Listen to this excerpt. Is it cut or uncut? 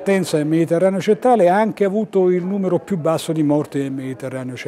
uncut